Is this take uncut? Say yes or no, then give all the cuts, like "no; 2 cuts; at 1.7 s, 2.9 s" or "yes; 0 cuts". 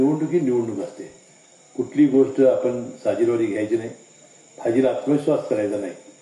yes; 0 cuts